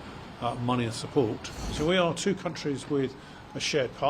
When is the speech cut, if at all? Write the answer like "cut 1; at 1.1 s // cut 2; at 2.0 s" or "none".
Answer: cut 1; at 1.6 s